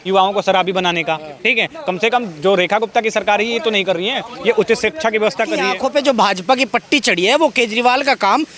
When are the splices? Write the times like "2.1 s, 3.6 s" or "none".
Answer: 5.7 s